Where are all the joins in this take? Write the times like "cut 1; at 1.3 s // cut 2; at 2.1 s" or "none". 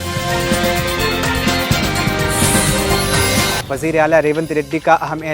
cut 1; at 3.6 s